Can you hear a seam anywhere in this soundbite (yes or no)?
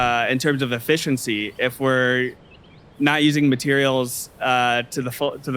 no